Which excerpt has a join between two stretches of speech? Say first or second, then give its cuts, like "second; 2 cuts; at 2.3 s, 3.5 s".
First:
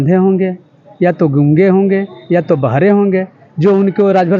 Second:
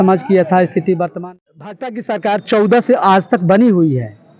second; 1 cut; at 1.1 s